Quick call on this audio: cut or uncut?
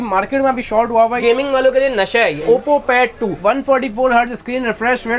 cut